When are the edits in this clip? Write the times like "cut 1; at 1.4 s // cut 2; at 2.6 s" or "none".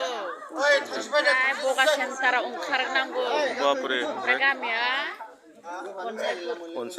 none